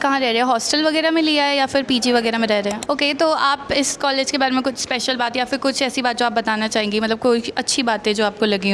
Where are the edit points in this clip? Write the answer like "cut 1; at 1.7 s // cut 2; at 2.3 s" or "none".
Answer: cut 1; at 2.8 s